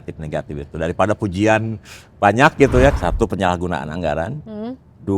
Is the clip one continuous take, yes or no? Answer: no